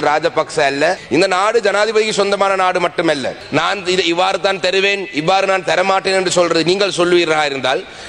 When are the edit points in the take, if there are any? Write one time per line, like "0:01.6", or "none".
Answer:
0:01.0
0:03.4